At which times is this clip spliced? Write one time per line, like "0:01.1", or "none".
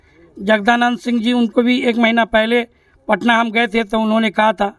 none